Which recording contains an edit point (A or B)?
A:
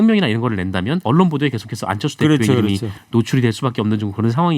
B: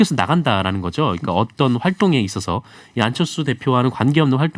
A